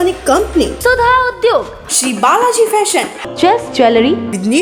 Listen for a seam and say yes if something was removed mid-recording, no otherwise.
no